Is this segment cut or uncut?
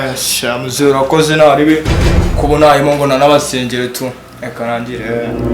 uncut